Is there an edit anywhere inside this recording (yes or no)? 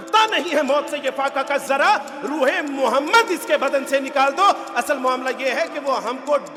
no